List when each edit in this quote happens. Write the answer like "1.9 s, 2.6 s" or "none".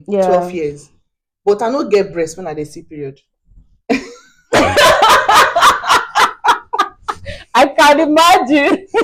none